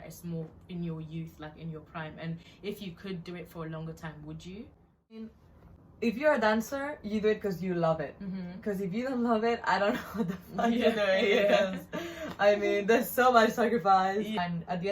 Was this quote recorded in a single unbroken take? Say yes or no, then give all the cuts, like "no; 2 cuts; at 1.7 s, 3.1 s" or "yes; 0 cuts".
no; 1 cut; at 5.7 s